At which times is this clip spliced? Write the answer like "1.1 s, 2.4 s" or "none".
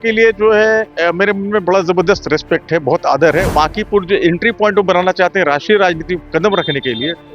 3.5 s